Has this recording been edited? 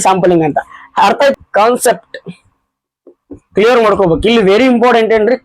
yes; 1 cut; at 1.3 s

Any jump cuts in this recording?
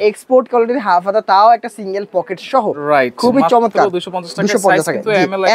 no; 0 cuts

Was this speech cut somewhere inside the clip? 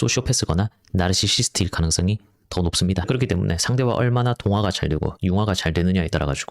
yes; 1 cut; at 3.1 s

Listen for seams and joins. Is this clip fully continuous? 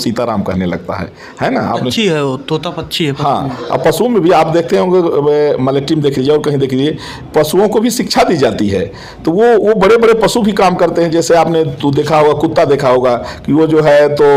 yes; 0 cuts

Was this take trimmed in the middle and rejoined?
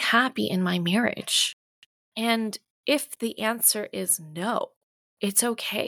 no; 0 cuts

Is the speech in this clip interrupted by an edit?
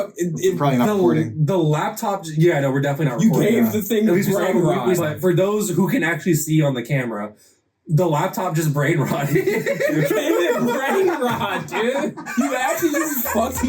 yes; 3 cuts; at 5.0 s, 10.0 s, 12.3 s

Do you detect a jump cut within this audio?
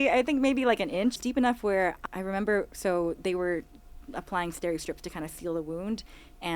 yes; 2 cuts; at 1.2 s, 2.0 s

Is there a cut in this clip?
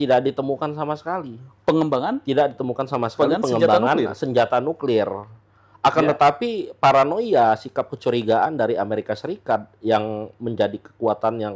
no; 0 cuts

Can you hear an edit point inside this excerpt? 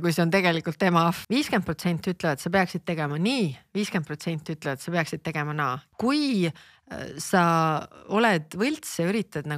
yes; 2 cuts; at 1.2 s, 5.8 s

